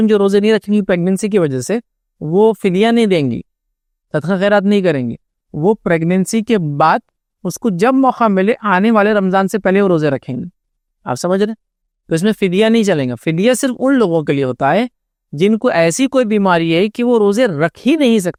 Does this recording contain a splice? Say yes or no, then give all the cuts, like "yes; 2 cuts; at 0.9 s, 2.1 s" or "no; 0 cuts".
no; 0 cuts